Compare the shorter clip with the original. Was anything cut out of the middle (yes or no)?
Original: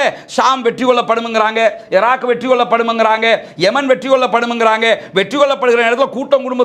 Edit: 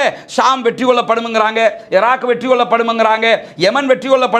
no